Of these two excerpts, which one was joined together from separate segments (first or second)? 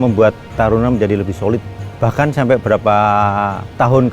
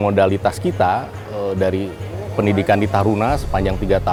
first